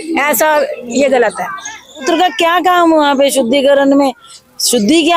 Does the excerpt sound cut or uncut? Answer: cut